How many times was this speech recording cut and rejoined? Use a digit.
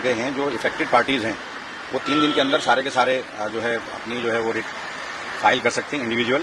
0